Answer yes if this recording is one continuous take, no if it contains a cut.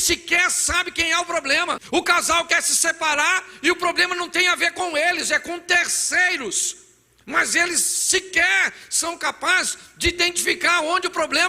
no